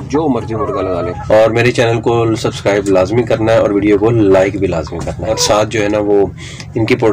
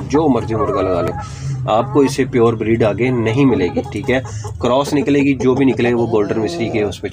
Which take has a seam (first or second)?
first